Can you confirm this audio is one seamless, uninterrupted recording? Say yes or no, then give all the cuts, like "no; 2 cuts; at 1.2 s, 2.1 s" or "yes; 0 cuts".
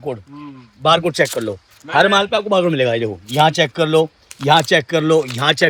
yes; 0 cuts